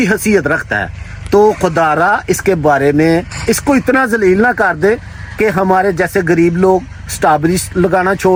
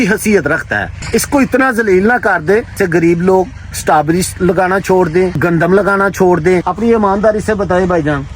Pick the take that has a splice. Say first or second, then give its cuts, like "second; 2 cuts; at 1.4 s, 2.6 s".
second; 4 cuts; at 1.0 s, 2.7 s, 5.4 s, 6.7 s